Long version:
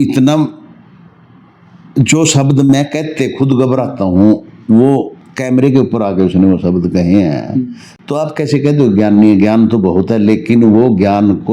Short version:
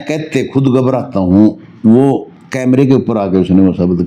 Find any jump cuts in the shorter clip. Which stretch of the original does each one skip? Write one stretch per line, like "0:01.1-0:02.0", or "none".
none